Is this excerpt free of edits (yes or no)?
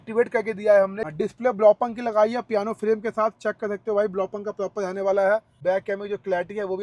no